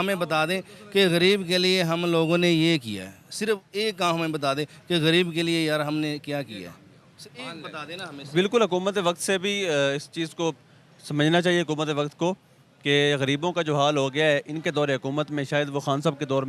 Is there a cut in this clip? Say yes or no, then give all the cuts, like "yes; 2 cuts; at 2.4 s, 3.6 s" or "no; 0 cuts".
no; 0 cuts